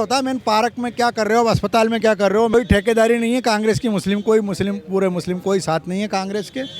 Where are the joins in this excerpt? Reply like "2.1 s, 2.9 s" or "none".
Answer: 2.5 s